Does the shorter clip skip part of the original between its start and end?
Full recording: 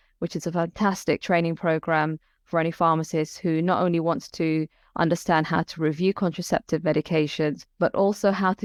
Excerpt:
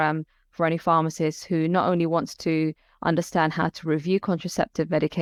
no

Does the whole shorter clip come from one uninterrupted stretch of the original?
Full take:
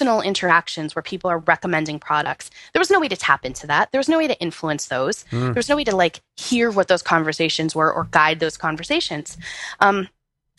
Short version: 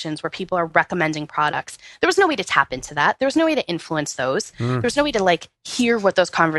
yes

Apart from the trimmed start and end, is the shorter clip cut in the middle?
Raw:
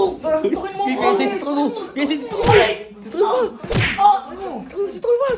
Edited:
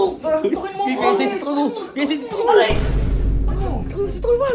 yes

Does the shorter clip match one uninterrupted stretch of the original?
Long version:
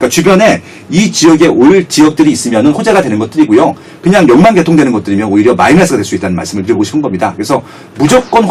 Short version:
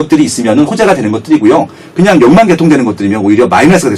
yes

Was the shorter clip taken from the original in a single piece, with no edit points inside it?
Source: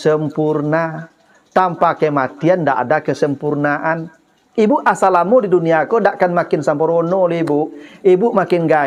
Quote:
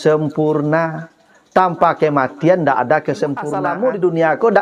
no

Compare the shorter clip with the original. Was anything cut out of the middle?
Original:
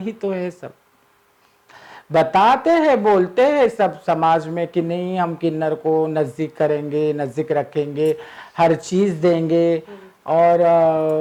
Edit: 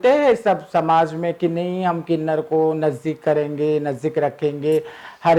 no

